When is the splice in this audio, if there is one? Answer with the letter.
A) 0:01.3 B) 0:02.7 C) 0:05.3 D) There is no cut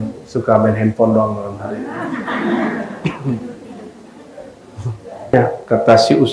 C